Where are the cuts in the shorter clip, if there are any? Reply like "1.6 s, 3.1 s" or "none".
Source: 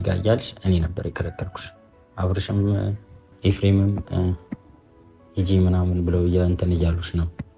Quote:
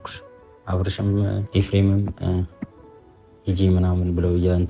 1.4 s